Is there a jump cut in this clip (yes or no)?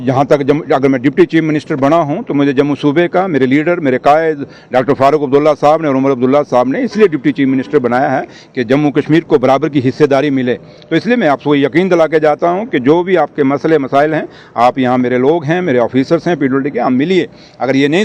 no